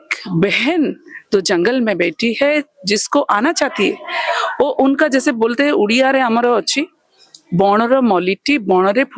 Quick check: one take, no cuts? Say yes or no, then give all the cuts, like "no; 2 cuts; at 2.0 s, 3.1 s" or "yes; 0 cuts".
yes; 0 cuts